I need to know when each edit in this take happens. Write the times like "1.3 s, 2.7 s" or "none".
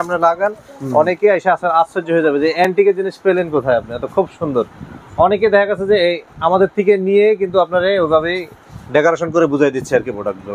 none